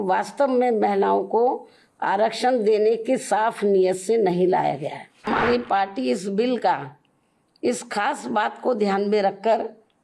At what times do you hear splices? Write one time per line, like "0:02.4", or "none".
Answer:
0:05.3